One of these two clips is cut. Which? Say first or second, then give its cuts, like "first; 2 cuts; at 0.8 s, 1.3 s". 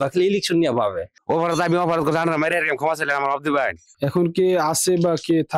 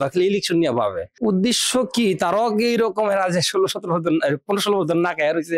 first; 2 cuts; at 1.1 s, 3.8 s